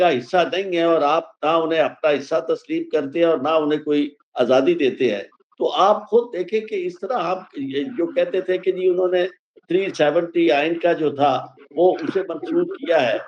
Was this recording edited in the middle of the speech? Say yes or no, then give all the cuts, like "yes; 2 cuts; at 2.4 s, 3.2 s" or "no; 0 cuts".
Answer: no; 0 cuts